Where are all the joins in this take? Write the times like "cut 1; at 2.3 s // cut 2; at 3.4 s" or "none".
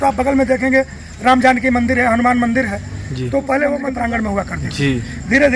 cut 1; at 3.9 s